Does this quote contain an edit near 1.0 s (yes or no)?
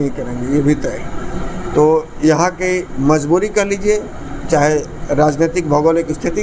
no